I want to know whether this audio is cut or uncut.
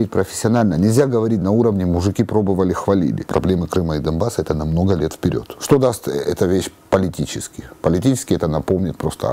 cut